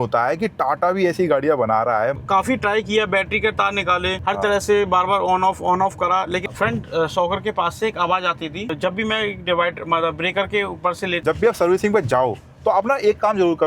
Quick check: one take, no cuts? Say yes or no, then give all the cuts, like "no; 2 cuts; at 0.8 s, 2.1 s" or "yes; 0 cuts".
no; 5 cuts; at 2.2 s, 4.2 s, 6.4 s, 8.7 s, 11.2 s